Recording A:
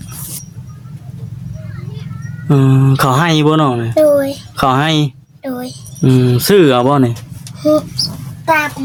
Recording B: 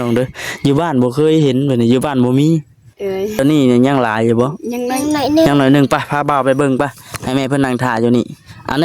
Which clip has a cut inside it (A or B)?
B